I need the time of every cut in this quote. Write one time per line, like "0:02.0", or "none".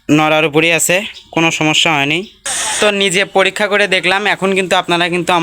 0:02.8